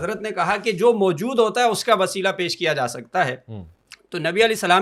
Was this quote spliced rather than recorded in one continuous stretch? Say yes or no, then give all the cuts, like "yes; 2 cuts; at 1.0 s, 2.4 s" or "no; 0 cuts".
no; 0 cuts